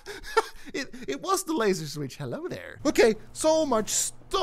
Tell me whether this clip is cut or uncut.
cut